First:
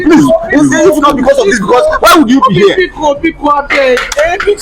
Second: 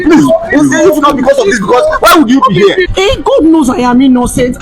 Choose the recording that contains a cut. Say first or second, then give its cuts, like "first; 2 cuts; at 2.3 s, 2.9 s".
second; 1 cut; at 2.9 s